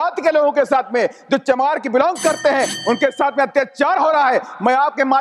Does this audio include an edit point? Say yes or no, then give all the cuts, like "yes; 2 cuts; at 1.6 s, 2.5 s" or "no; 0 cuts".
no; 0 cuts